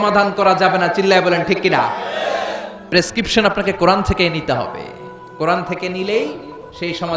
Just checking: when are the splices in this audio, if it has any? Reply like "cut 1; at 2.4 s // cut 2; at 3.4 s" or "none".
none